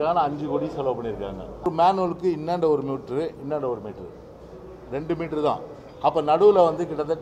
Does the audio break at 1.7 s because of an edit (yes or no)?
yes